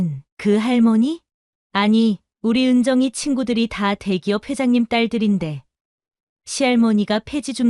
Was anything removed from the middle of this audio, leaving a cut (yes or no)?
no